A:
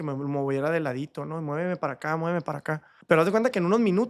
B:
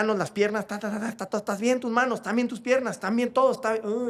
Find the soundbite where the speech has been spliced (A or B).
A